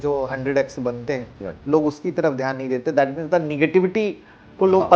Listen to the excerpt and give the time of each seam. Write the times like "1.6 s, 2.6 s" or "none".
none